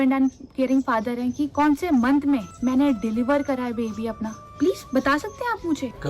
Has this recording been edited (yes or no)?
yes